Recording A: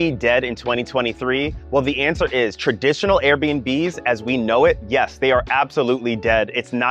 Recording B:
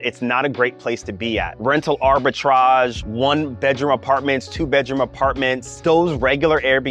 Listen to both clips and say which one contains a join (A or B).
B